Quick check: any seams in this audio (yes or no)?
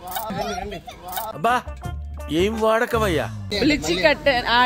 yes